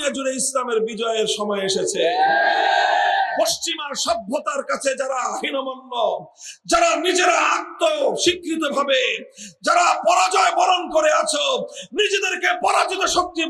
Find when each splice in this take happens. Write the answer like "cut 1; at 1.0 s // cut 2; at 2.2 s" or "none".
none